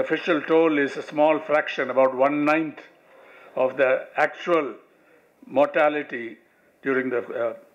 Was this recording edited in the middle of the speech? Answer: no; 0 cuts

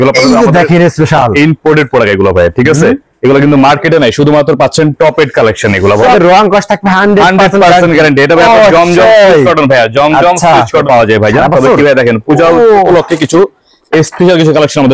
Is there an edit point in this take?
yes; 2 cuts; at 6.1 s, 10.8 s

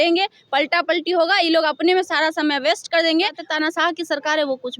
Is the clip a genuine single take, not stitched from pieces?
no; 1 cut; at 3.4 s

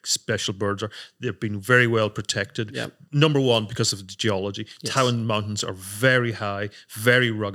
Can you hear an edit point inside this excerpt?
no; 0 cuts

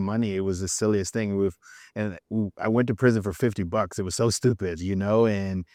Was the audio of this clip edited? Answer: no; 0 cuts

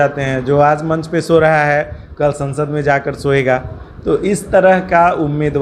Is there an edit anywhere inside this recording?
no; 0 cuts

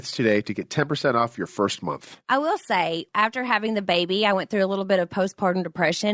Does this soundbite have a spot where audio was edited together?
yes; 1 cut; at 2.1 s

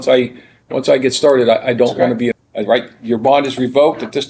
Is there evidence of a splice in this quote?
yes; 1 cut; at 2.4 s

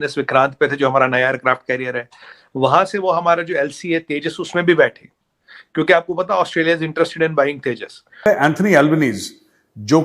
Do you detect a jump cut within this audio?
yes; 1 cut; at 8.3 s

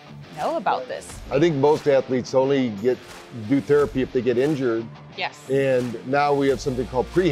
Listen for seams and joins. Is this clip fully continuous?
no; 1 cut; at 1.2 s

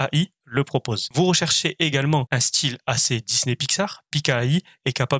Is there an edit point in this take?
yes; 2 cuts; at 1.0 s, 2.3 s

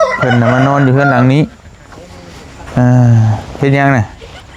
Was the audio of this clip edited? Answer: no; 0 cuts

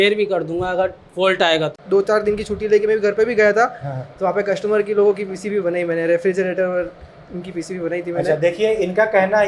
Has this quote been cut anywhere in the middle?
yes; 1 cut; at 1.8 s

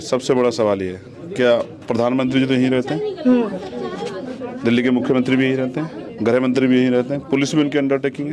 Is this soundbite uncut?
yes; 0 cuts

